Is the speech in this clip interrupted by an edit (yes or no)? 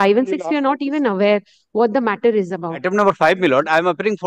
yes